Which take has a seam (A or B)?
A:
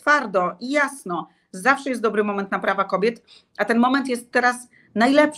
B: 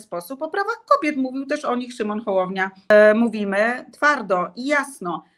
B